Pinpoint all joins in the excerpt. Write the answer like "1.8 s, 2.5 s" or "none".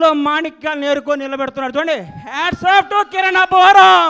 none